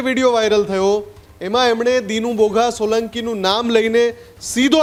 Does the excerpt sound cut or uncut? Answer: uncut